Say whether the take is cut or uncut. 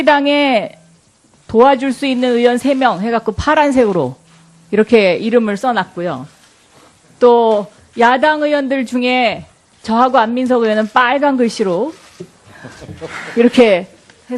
uncut